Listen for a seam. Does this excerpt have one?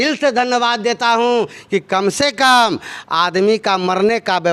no; 0 cuts

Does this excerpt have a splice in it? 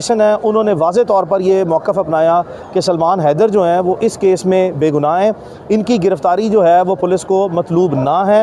no; 0 cuts

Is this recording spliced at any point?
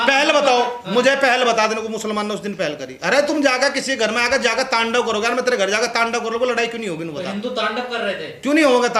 no; 0 cuts

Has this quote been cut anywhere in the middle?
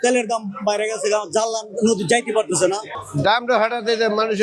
yes; 1 cut; at 3.0 s

